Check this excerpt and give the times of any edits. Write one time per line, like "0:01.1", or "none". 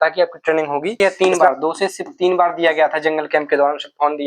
0:01.0